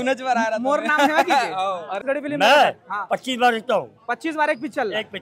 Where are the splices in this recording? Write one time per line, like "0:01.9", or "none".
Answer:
0:02.0